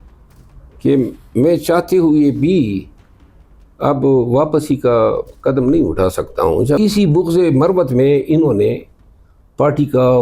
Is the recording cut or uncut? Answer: cut